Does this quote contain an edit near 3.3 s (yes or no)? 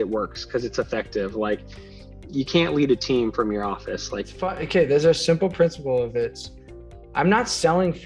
no